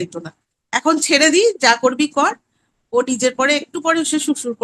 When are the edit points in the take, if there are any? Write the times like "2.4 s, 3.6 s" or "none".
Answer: none